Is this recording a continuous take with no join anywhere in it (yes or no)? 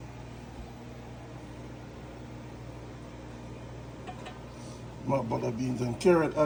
yes